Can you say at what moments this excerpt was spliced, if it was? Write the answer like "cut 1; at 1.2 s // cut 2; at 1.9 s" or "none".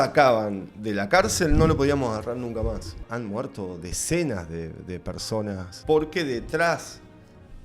cut 1; at 3.0 s // cut 2; at 5.7 s